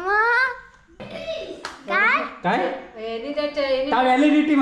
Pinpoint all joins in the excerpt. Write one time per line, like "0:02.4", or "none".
0:01.0